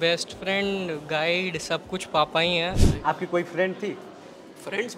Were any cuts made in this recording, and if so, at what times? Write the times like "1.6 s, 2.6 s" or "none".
2.9 s